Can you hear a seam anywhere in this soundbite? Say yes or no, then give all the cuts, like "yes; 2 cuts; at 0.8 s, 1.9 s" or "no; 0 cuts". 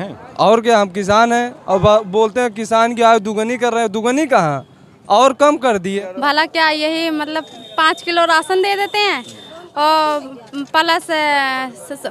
yes; 1 cut; at 6.0 s